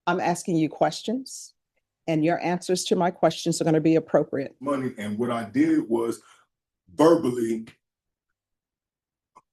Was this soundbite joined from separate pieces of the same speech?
yes; 1 cut; at 4.6 s

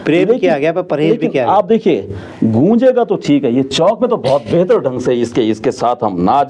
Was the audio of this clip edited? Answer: no; 0 cuts

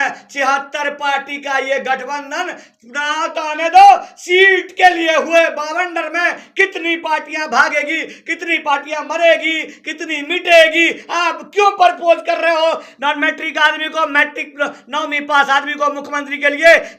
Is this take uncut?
yes; 0 cuts

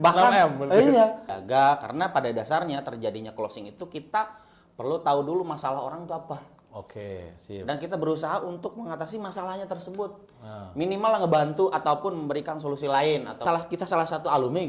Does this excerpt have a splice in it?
yes; 2 cuts; at 1.3 s, 13.4 s

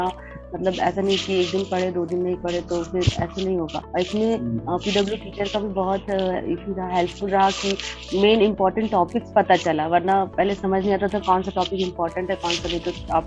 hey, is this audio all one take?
no; 1 cut; at 3.8 s

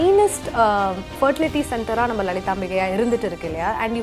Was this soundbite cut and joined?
no; 0 cuts

